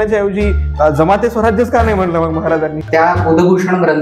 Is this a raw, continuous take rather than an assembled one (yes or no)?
no